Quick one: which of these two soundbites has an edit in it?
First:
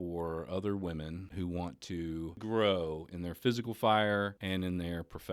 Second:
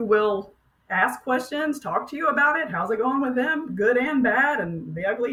first; 3 cuts; at 1.2 s, 2.4 s, 4.4 s

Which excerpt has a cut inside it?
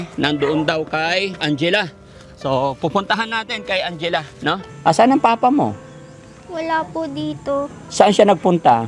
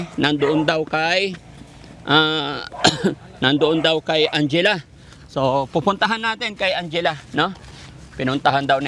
first; 2 cuts; at 1.4 s, 4.7 s

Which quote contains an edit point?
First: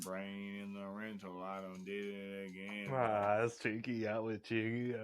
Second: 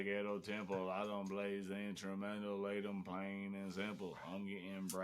first; 1 cut; at 2.9 s

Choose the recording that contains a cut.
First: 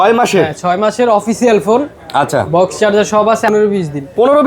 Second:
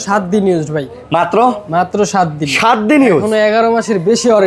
first; 1 cut; at 3.5 s

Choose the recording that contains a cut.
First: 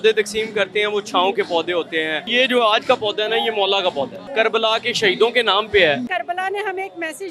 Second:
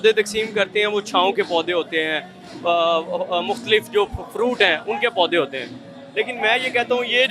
first; 3 cuts; at 2.3 s, 4.2 s, 6.1 s

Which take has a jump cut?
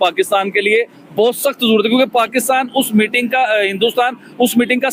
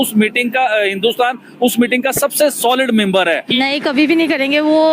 second; 1 cut; at 3.6 s

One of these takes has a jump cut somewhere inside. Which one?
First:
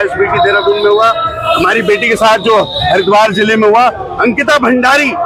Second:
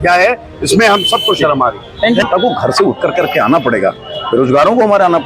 second; 1 cut; at 2.3 s

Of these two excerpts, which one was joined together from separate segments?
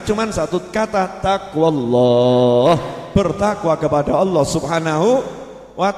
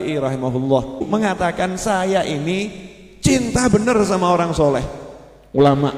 second; 1 cut; at 1.1 s

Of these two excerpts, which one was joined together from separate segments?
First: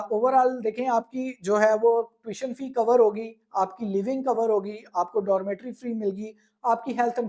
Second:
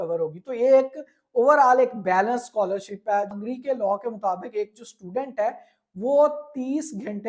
second; 1 cut; at 3.3 s

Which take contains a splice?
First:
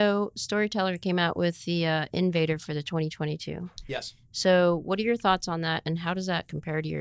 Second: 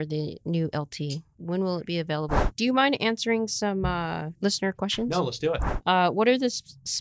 second; 4 cuts; at 1.3 s, 2.4 s, 4.3 s, 5.7 s

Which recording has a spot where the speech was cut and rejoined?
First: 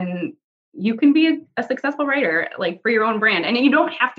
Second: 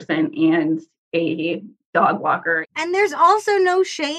second; 2 cuts; at 1.7 s, 2.6 s

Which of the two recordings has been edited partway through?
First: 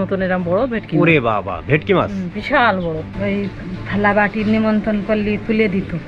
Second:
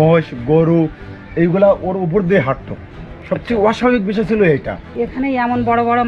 first; 1 cut; at 3.1 s

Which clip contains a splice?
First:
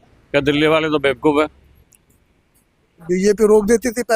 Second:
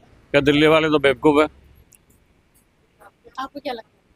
first; 1 cut; at 3.0 s

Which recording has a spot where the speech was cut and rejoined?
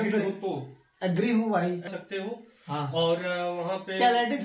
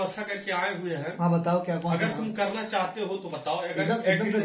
first; 1 cut; at 1.9 s

